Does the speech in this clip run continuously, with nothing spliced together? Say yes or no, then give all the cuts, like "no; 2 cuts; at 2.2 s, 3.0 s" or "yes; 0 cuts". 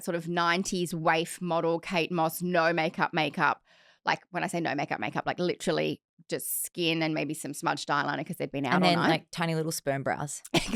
yes; 0 cuts